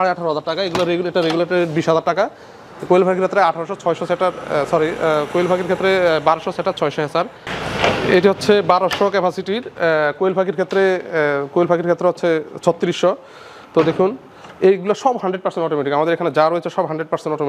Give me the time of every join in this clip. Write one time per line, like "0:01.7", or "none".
0:07.5